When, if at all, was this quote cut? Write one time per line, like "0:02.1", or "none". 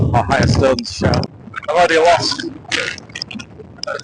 0:01.3